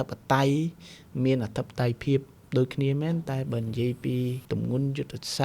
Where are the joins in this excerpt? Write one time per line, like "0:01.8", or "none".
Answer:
0:04.4